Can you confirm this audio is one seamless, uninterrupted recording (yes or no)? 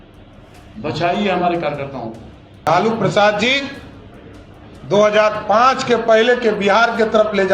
no